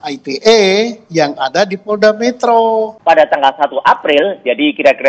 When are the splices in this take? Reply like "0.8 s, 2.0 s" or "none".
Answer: 2.9 s